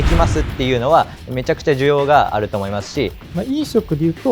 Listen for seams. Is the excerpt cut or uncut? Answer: cut